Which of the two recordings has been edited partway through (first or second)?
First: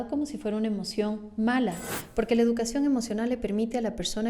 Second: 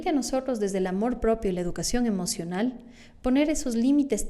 first